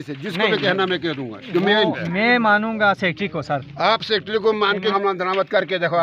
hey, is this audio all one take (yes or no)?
no